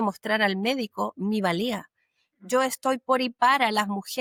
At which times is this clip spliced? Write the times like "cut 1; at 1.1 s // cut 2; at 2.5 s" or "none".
none